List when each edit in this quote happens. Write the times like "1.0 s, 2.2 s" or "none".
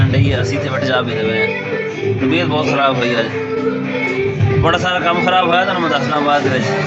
none